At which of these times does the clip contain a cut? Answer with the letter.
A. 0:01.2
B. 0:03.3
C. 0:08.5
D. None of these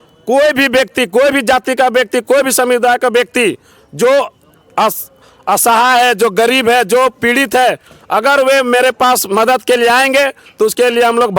D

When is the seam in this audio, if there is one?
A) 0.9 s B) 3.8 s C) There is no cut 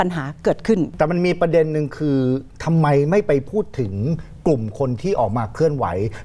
A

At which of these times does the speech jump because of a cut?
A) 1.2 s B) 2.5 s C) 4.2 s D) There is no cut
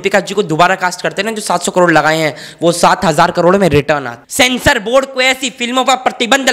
C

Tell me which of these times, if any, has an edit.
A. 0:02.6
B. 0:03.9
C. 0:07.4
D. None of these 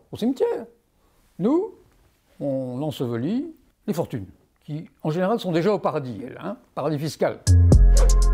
C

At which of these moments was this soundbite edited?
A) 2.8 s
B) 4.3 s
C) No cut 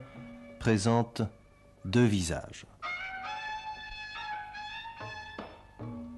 B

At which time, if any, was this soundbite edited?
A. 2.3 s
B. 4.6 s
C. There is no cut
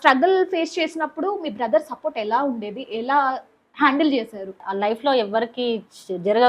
B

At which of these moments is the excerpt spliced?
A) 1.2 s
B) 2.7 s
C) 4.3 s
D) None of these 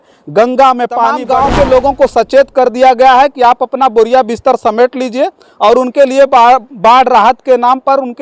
A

